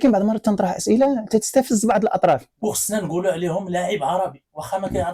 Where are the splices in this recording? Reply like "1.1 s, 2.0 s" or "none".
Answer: 2.5 s